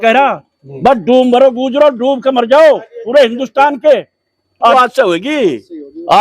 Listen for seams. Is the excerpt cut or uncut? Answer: cut